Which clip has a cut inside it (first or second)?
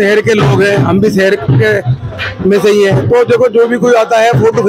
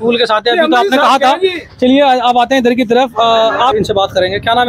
second